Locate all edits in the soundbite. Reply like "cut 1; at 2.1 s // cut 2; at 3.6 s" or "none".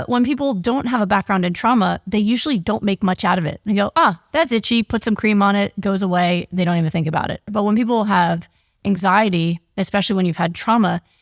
cut 1; at 7.4 s